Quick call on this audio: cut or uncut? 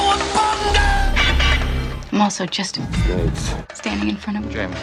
uncut